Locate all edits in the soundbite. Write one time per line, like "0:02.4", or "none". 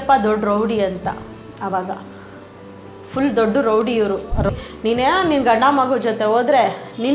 0:04.5